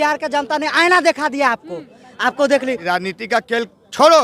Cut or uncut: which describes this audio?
cut